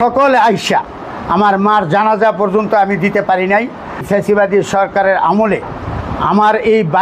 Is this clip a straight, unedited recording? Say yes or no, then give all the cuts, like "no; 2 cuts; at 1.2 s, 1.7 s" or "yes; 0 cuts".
no; 1 cut; at 4.0 s